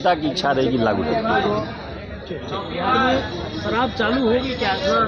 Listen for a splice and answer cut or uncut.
uncut